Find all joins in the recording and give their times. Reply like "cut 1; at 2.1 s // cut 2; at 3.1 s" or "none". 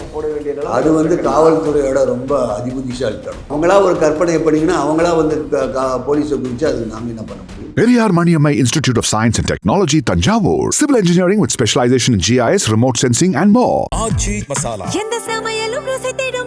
cut 1; at 3.5 s // cut 2; at 7.6 s